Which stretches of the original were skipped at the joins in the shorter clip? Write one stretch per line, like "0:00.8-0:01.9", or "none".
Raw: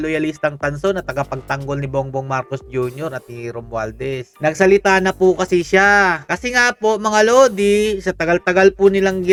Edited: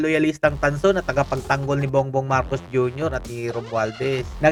none